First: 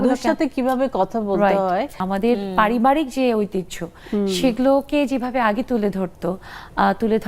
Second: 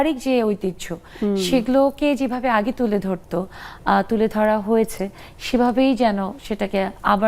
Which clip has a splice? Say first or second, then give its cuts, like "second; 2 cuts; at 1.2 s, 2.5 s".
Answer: first; 1 cut; at 2.0 s